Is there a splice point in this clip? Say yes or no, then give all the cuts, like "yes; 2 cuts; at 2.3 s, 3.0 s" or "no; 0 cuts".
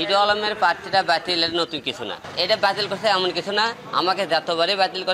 yes; 2 cuts; at 2.3 s, 3.8 s